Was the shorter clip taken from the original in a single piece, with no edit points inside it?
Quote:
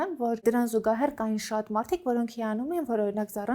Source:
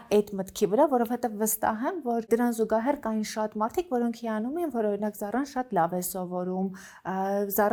yes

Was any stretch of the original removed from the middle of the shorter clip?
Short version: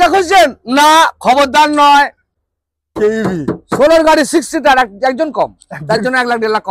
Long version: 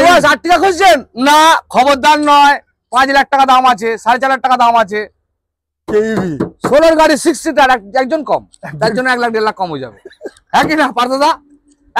yes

